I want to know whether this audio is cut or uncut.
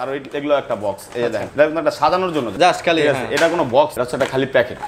cut